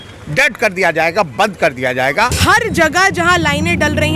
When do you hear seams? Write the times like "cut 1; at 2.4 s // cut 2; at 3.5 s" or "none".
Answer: cut 1; at 2.1 s